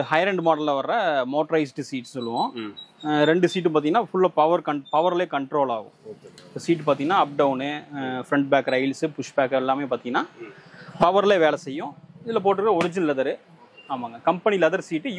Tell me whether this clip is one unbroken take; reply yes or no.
yes